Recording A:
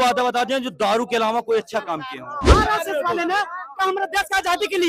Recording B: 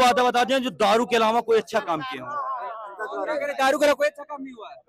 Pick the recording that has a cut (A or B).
A